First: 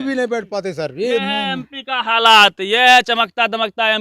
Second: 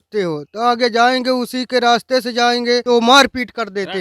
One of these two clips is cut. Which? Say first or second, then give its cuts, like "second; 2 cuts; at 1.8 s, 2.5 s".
second; 1 cut; at 2.8 s